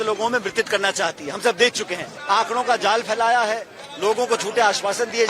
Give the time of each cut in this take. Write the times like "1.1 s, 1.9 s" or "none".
2.1 s